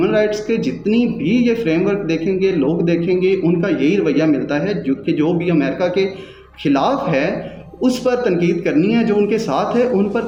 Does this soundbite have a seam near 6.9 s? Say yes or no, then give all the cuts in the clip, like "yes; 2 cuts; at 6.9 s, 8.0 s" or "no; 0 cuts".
no; 0 cuts